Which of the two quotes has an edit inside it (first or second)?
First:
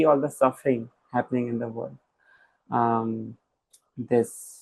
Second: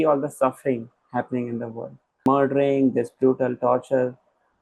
second